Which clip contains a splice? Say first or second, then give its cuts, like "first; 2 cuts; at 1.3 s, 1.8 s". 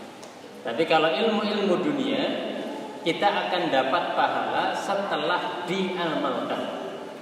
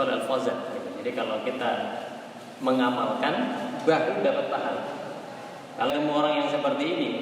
second; 1 cut; at 5.9 s